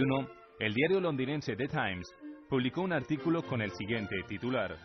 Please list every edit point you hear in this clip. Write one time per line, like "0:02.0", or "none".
none